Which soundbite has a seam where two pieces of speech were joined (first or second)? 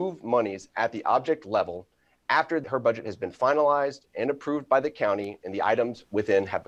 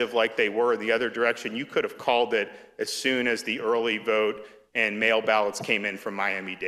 first